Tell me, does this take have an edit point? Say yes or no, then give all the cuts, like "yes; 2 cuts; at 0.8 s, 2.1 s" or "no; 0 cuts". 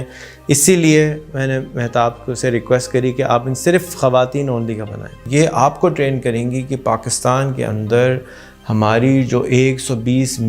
yes; 1 cut; at 5.1 s